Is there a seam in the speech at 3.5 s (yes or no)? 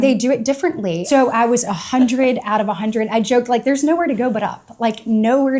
no